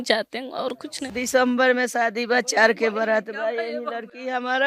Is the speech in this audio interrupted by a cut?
yes; 1 cut; at 0.9 s

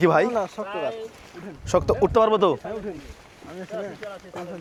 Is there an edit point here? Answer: no; 0 cuts

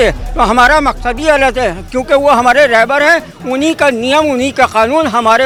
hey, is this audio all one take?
yes; 0 cuts

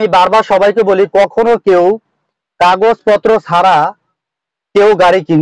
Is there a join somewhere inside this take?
no; 0 cuts

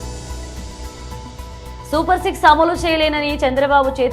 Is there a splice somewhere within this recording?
yes; 1 cut; at 1.5 s

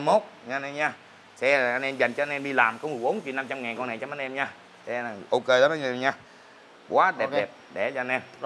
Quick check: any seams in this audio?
no; 0 cuts

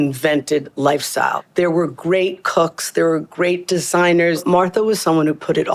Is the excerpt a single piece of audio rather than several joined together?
no; 2 cuts; at 1.4 s, 4.4 s

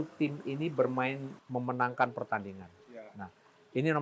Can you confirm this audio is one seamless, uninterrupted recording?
no; 1 cut; at 1.3 s

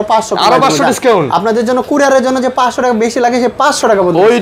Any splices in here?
no; 0 cuts

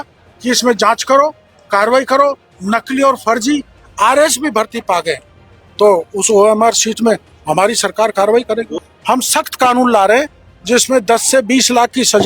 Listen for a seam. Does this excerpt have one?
yes; 1 cut; at 8.8 s

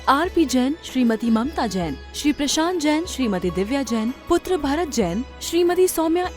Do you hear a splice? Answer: no; 0 cuts

